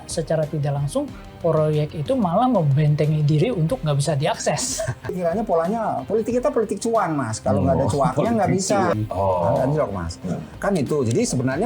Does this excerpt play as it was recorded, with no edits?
no; 2 cuts; at 5.1 s, 9.0 s

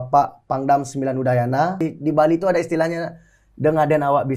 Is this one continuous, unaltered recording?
no; 1 cut; at 1.8 s

